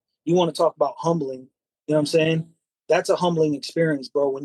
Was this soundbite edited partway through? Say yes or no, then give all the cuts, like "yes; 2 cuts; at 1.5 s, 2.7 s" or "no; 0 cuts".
no; 0 cuts